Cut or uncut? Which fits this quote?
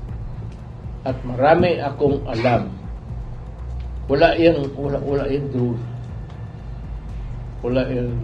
uncut